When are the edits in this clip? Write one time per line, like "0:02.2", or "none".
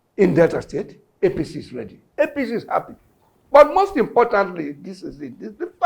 0:02.1